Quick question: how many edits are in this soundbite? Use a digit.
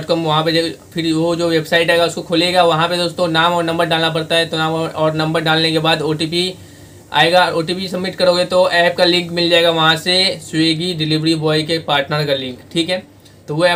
0